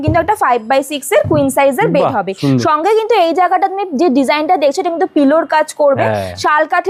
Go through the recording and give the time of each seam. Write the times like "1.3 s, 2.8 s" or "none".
none